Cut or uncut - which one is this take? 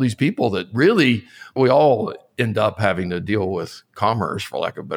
cut